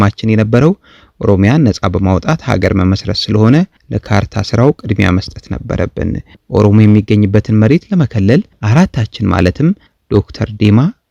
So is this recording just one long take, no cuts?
yes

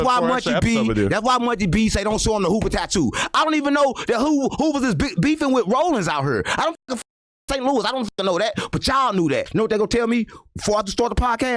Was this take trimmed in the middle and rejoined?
yes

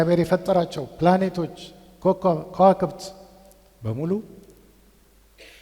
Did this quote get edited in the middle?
no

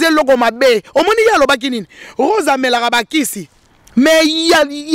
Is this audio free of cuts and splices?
yes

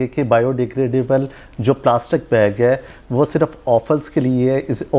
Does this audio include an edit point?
no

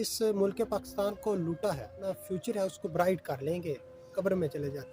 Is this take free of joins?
no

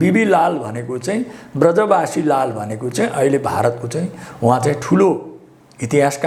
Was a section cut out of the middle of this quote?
no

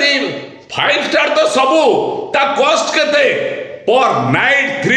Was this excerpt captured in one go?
yes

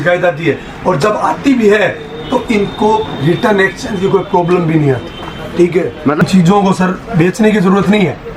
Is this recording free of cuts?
no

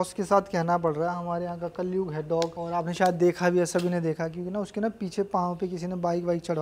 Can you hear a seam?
no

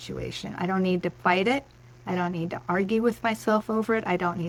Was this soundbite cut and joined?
no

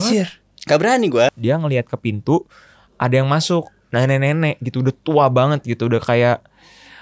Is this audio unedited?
no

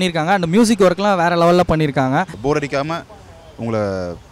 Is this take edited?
yes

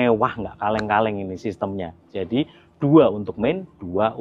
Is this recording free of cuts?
yes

